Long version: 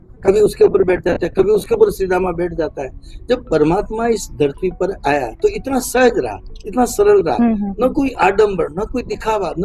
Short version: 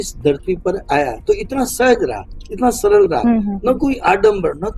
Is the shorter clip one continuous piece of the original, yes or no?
yes